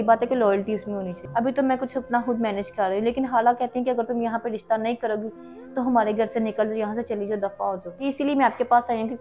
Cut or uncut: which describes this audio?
cut